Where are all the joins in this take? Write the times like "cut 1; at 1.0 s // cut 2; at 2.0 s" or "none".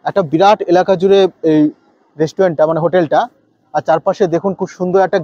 none